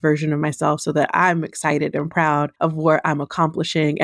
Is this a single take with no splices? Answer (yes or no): no